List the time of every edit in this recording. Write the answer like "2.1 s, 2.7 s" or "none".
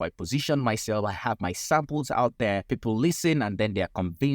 2.7 s